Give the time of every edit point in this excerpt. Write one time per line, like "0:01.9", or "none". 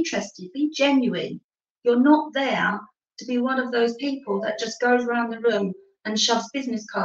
none